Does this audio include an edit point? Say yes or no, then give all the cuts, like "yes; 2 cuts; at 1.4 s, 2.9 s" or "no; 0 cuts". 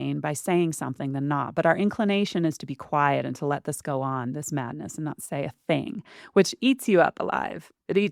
no; 0 cuts